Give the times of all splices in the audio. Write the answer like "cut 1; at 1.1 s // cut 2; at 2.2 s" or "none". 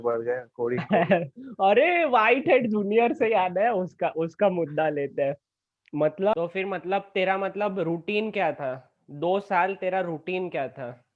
cut 1; at 6.3 s